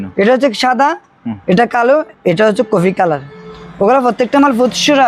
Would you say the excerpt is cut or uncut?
uncut